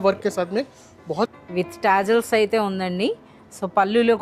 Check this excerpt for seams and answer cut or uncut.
cut